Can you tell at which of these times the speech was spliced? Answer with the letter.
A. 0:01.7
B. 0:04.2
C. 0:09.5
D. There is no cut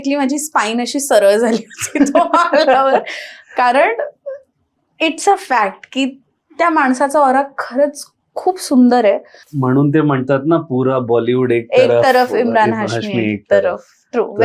C